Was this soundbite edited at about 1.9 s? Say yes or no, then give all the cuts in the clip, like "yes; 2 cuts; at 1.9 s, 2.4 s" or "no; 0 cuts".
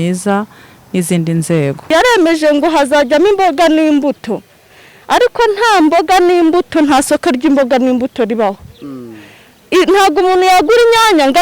yes; 1 cut; at 1.9 s